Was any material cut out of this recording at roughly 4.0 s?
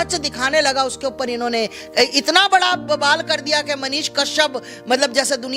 no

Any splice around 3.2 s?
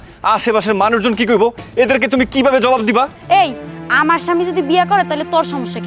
yes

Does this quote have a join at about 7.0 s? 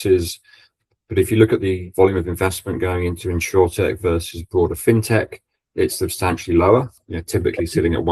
yes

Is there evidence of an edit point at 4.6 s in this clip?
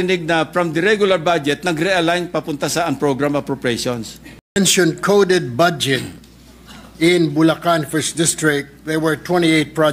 yes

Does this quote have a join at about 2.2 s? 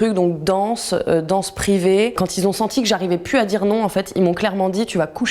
yes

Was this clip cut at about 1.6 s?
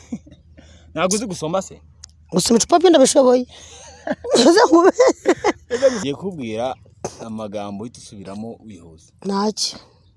no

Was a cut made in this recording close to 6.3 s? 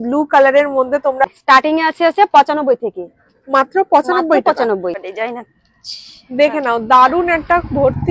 no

